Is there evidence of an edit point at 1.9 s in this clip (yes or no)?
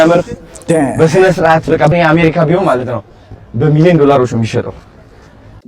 yes